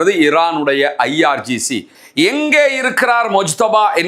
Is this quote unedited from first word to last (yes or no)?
no